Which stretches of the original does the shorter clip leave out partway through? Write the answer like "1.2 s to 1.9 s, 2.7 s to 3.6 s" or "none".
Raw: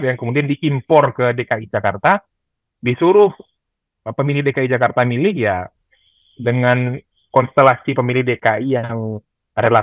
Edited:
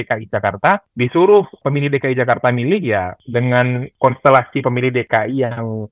2.3 s to 2.7 s, 3.4 s to 4.1 s, 5.7 s to 6.3 s, 7.0 s to 7.2 s